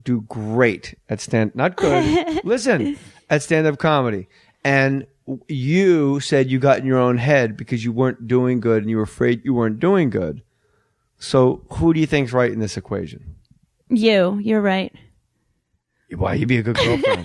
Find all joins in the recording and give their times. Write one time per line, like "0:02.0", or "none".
0:01.9